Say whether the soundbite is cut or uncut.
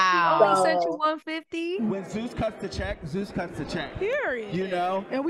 cut